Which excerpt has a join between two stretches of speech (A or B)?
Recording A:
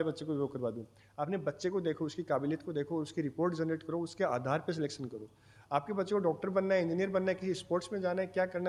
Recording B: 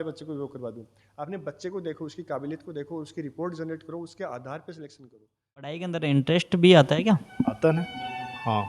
B